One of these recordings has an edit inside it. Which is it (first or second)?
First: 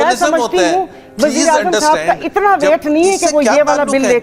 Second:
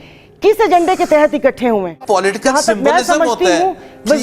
second